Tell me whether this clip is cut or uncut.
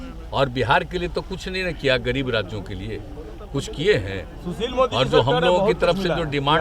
uncut